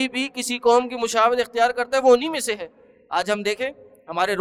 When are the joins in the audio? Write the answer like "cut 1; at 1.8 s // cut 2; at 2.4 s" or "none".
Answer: none